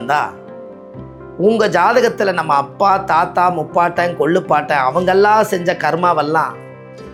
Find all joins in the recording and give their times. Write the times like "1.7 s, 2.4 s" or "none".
none